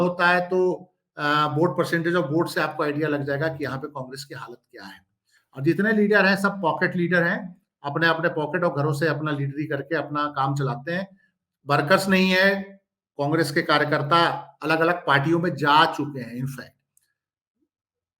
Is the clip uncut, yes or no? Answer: yes